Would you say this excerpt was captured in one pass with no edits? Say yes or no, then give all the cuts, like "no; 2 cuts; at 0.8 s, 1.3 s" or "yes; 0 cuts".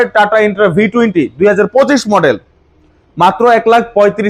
yes; 0 cuts